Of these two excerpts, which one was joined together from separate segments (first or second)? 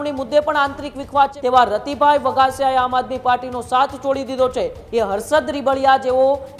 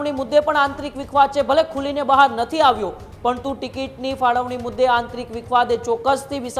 first